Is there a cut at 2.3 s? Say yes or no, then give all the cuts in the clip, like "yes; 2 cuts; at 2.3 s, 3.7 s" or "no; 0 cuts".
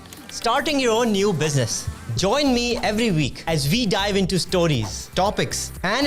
no; 0 cuts